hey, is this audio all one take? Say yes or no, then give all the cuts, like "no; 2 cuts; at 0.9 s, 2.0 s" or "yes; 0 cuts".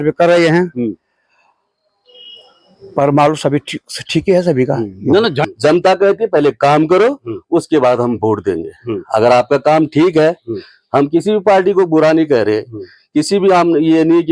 no; 1 cut; at 5.4 s